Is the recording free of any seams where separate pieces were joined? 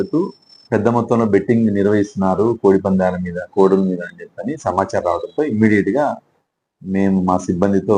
yes; 0 cuts

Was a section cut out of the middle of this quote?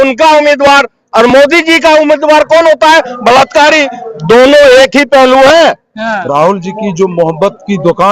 yes; 1 cut; at 6.1 s

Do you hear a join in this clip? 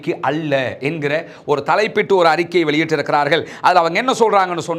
no; 0 cuts

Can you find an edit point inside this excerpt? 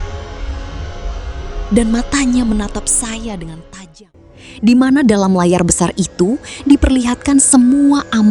yes; 1 cut; at 3.8 s

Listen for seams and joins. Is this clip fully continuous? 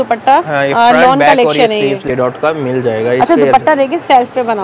no; 1 cut; at 2.0 s

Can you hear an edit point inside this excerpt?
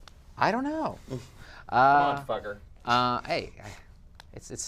yes; 1 cut; at 3.4 s

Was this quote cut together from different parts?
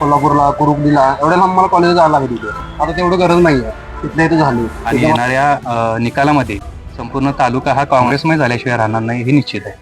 yes; 2 cuts; at 5.1 s, 8.1 s

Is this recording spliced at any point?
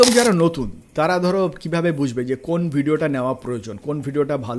no; 0 cuts

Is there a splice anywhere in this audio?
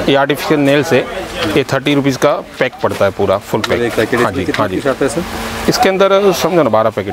no; 0 cuts

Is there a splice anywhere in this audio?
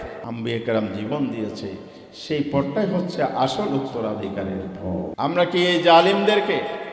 yes; 1 cut; at 5.1 s

